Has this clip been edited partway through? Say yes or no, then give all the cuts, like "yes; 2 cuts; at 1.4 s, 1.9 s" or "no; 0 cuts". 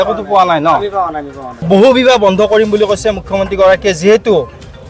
yes; 1 cut; at 1.7 s